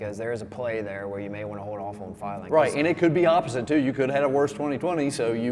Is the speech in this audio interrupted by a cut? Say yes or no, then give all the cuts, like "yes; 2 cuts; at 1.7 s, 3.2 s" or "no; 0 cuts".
no; 0 cuts